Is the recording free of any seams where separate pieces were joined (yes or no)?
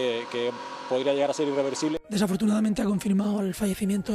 no